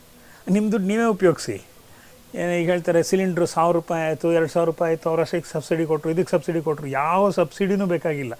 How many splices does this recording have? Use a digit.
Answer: 0